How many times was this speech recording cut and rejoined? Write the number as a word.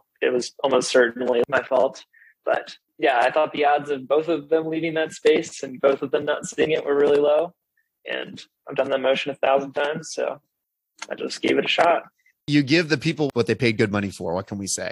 one